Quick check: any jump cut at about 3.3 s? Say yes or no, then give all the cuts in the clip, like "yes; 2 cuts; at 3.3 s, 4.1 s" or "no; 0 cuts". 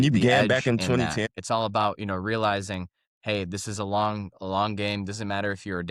no; 1 cut; at 1.3 s